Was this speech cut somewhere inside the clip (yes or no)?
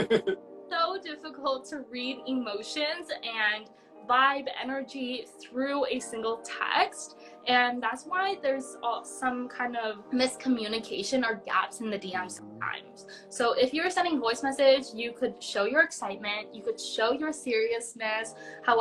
no